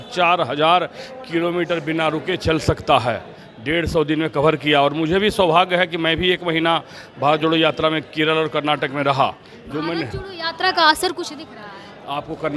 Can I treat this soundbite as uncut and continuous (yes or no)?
yes